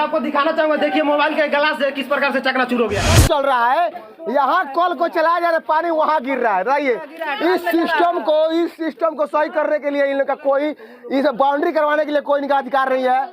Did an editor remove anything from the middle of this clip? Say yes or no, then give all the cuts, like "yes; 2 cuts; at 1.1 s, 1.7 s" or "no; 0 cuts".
yes; 1 cut; at 3.1 s